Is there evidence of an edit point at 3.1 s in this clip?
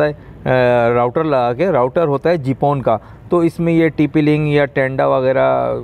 no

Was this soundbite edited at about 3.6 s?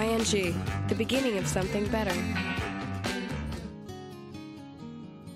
yes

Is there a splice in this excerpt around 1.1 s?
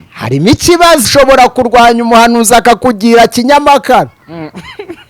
yes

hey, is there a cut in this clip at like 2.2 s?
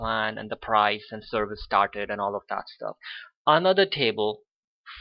no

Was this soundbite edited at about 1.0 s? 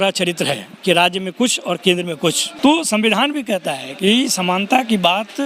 no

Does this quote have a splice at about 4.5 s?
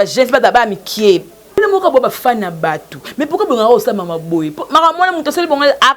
no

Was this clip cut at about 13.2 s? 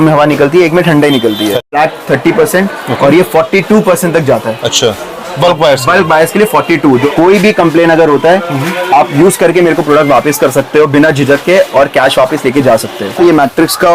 yes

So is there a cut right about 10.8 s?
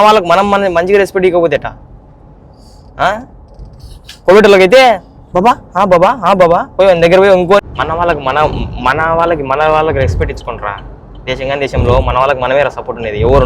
no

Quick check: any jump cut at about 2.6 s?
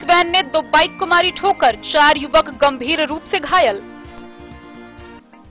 no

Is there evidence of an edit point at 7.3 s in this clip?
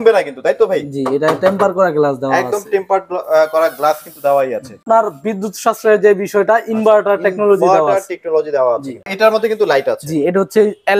no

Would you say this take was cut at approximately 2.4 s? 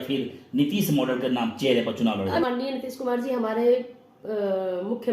yes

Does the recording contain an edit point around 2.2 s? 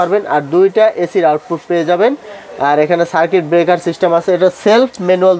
no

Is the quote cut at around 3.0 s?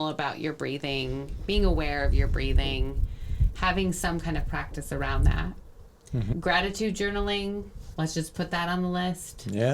no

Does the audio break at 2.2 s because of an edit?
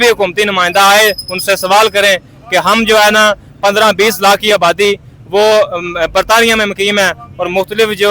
no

